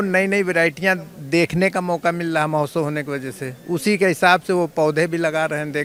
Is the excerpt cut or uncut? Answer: uncut